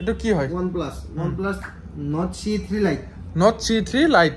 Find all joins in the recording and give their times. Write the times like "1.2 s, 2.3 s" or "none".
none

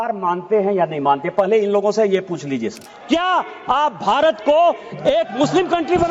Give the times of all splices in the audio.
2.9 s

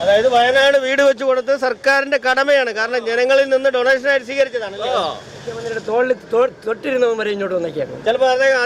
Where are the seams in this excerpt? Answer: 5.6 s

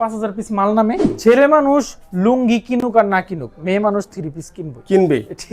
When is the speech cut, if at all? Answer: 1.1 s

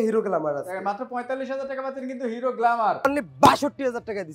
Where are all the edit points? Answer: 3.0 s

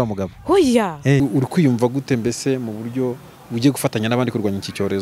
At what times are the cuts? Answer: 1.2 s

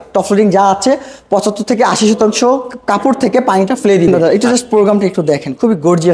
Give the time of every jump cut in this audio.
4.2 s

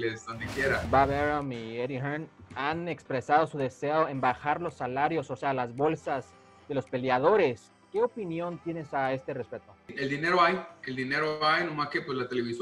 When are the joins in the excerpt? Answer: 0.9 s, 9.9 s

